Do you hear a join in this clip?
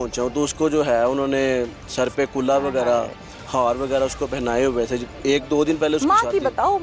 no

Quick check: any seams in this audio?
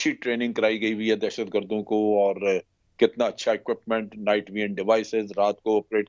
no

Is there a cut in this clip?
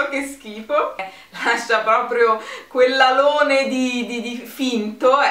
yes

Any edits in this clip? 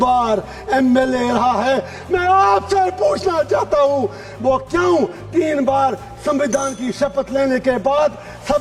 no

